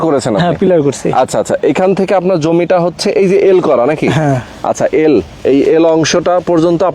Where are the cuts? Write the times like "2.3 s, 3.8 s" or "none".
none

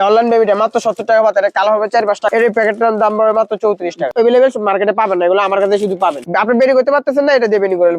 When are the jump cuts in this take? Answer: 2.2 s, 4.1 s, 6.3 s

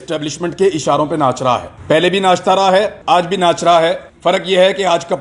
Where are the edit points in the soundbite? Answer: 1.7 s, 3.0 s, 4.1 s

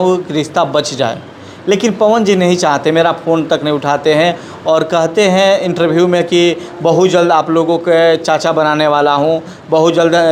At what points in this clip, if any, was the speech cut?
none

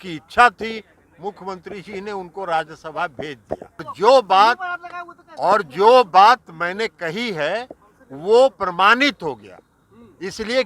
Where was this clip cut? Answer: 3.9 s

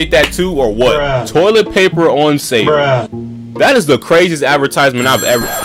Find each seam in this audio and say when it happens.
1.0 s

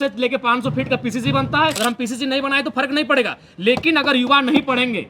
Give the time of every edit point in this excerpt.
1.8 s

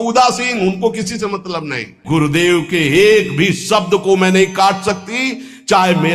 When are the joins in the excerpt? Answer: 2.0 s

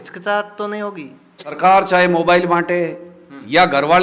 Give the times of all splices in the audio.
1.6 s

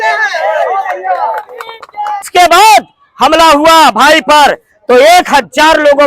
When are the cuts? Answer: 2.3 s

